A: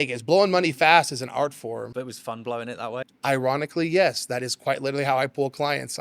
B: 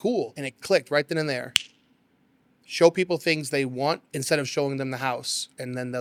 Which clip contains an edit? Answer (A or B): A